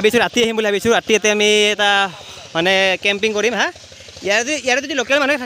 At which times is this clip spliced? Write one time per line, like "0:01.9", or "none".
none